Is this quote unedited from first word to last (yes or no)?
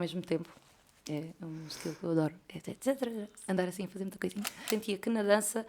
no